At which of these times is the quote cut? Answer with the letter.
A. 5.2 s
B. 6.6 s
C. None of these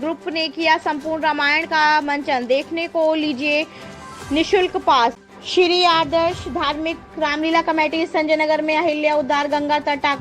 A